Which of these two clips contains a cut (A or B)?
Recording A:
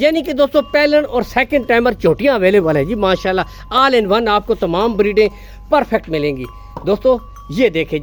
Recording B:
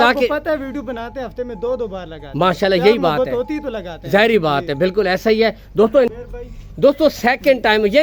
B